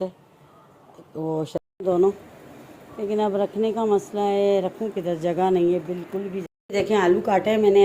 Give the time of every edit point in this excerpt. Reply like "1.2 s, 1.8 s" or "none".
1.6 s, 6.5 s